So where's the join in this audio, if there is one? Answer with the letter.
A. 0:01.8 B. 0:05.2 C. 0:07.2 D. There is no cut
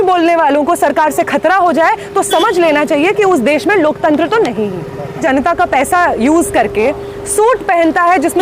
B